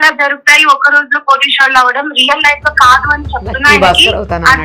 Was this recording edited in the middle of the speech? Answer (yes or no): no